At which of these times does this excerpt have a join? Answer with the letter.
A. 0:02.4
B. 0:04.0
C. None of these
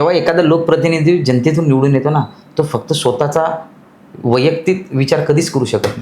C